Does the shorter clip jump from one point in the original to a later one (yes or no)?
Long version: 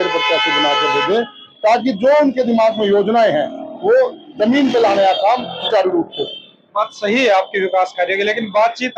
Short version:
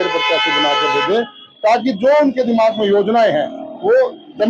no